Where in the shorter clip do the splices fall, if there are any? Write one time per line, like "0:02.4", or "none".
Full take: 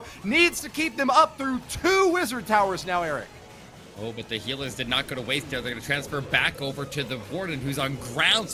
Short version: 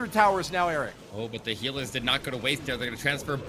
0:01.0